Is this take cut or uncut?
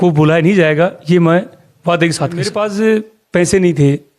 cut